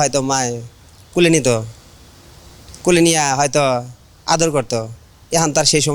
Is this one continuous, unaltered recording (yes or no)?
yes